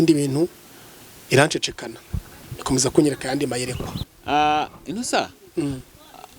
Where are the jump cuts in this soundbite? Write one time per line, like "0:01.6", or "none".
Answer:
0:04.2